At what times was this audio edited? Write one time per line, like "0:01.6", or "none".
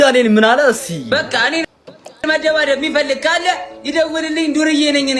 none